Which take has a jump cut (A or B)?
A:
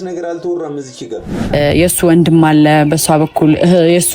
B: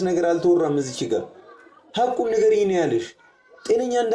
A